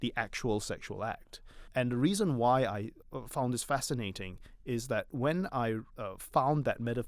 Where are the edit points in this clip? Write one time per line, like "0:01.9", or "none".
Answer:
0:01.7
0:03.0
0:05.9